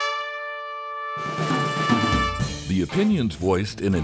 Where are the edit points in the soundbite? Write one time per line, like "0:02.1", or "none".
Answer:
0:02.6